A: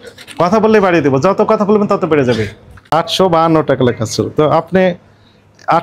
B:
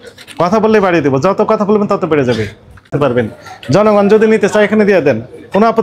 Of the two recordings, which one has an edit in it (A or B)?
A